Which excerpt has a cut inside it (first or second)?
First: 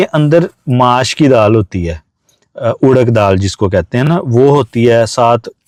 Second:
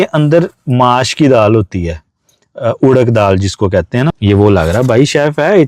second